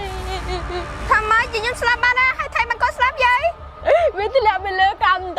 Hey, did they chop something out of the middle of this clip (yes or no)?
no